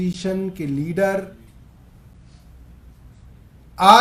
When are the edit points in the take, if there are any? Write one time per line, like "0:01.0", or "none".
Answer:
none